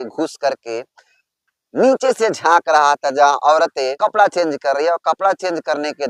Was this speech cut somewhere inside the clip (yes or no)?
yes